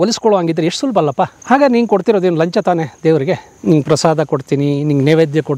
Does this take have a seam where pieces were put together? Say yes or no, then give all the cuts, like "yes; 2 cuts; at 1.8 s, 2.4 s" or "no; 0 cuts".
yes; 2 cuts; at 1.4 s, 3.5 s